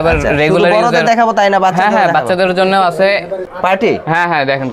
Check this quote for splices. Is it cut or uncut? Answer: cut